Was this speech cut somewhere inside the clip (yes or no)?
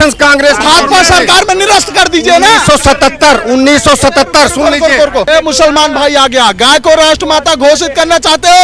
yes